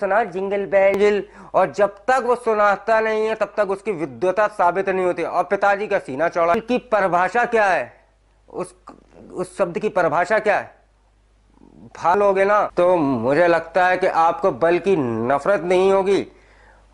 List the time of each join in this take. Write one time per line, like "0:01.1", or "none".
0:01.0
0:06.5
0:12.1